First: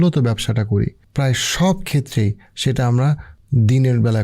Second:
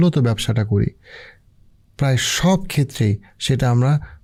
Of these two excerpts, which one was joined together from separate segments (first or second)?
first